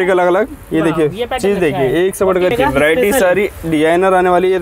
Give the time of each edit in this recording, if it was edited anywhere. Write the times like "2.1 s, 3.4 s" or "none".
2.5 s